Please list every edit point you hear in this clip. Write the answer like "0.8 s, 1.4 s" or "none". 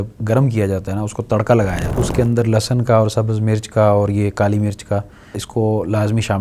1.8 s, 5.4 s